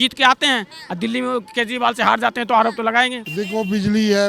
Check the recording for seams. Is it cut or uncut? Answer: cut